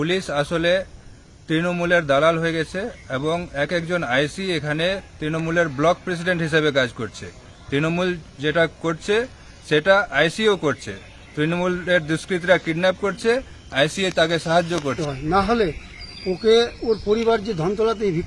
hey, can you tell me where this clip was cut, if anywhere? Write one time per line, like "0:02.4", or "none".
0:15.1